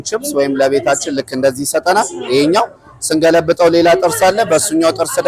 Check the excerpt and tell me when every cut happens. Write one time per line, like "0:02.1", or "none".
none